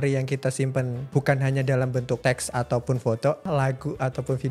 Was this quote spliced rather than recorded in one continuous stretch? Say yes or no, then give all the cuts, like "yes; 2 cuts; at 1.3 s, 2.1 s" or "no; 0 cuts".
yes; 3 cuts; at 1.0 s, 2.2 s, 3.5 s